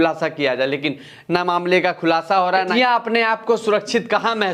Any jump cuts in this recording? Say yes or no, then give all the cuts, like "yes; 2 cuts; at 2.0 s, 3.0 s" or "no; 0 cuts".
yes; 1 cut; at 2.7 s